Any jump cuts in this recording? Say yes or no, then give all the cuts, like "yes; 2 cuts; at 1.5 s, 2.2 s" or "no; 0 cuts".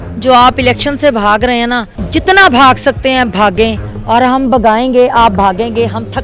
yes; 1 cut; at 1.9 s